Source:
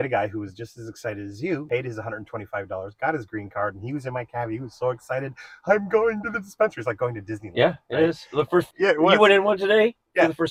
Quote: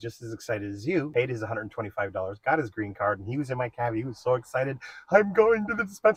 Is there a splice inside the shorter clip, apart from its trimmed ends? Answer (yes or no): no